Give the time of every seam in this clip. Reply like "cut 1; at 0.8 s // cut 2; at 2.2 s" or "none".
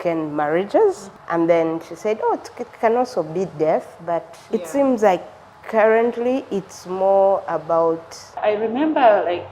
cut 1; at 1.1 s // cut 2; at 4.3 s // cut 3; at 8.4 s